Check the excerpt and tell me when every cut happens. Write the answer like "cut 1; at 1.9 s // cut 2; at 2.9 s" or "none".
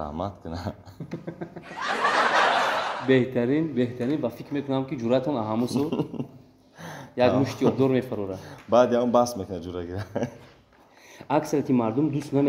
none